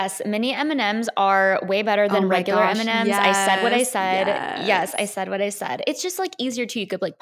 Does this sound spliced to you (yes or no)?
no